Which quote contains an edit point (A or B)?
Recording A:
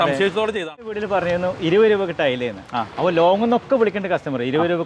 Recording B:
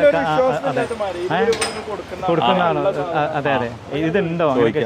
A